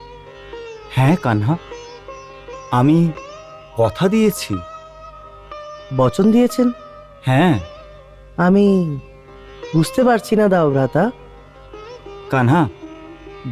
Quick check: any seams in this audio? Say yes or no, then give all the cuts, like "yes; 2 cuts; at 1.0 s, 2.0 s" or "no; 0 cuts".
no; 0 cuts